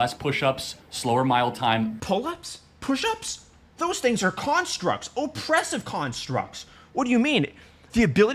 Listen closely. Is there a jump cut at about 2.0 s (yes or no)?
yes